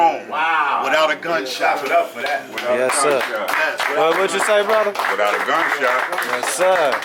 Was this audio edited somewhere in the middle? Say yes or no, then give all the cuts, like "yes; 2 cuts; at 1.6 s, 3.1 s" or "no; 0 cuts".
no; 0 cuts